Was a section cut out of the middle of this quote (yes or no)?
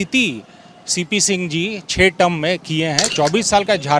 yes